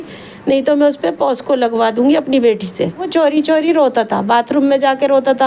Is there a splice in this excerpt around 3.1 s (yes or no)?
yes